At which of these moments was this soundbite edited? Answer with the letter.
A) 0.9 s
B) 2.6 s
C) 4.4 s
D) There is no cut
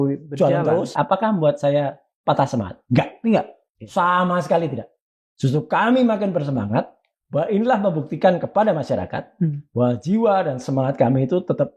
A